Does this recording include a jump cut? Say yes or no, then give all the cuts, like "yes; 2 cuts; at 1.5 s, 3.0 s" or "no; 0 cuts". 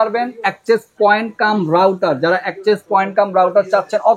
no; 0 cuts